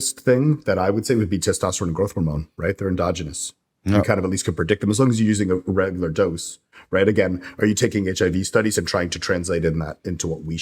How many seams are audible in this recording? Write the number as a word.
zero